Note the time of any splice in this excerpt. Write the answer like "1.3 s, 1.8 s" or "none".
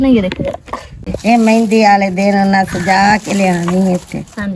1.0 s